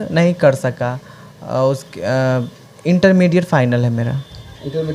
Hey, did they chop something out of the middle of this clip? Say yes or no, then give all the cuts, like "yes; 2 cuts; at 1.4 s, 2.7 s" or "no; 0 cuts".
no; 0 cuts